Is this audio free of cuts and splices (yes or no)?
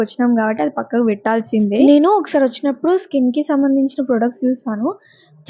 yes